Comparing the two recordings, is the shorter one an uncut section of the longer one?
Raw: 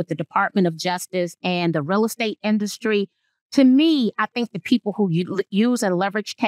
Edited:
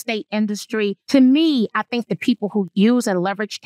no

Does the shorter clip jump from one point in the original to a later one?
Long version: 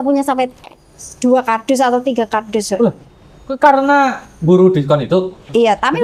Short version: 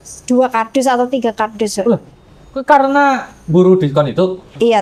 no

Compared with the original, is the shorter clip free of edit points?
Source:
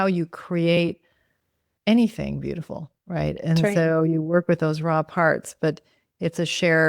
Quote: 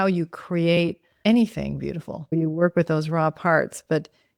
no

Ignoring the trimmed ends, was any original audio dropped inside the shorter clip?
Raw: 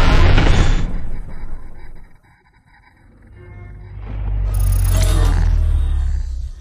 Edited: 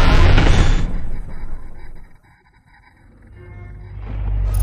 no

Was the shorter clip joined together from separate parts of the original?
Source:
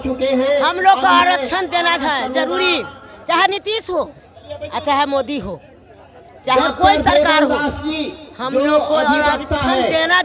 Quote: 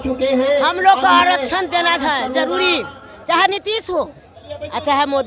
no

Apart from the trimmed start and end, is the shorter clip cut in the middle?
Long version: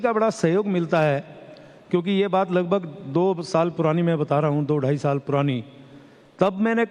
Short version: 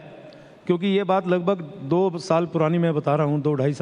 no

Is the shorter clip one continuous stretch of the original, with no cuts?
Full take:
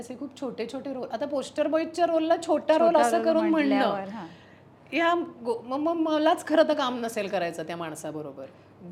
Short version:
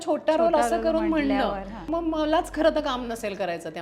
no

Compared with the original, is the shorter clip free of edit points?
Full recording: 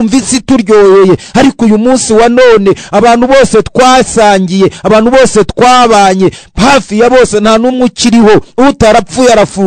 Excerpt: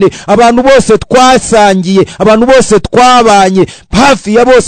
yes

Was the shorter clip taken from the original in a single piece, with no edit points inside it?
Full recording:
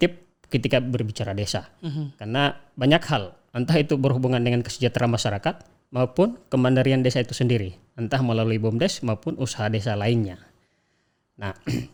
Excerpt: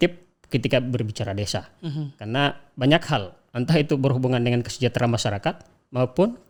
yes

